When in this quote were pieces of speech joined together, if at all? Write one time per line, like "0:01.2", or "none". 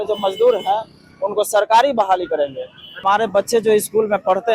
0:03.0